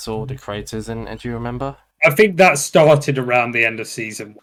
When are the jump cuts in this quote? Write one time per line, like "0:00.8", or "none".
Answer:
none